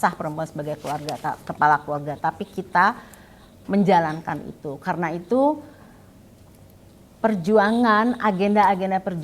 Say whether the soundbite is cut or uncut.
uncut